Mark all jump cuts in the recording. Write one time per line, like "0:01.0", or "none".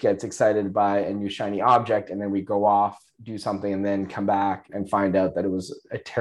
none